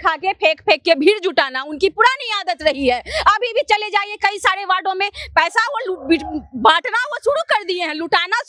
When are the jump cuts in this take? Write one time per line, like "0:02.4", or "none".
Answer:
none